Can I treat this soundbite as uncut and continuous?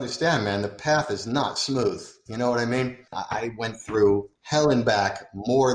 no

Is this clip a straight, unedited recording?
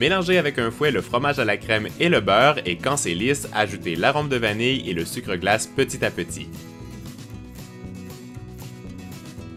yes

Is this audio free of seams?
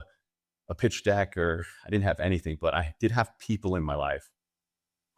yes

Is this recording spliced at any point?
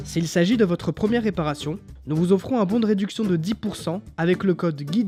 no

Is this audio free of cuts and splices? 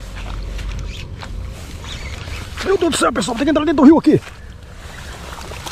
yes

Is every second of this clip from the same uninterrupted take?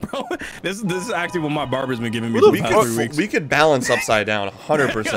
yes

